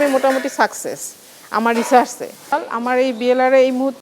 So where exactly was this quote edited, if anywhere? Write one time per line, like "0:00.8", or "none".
0:02.5